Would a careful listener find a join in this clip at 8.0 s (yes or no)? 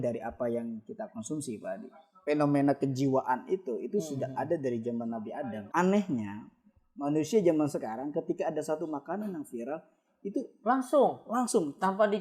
no